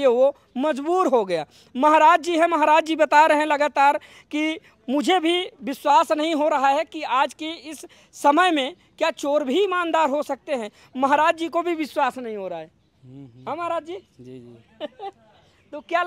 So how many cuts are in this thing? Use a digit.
0